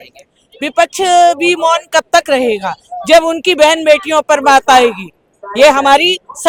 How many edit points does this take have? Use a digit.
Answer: 0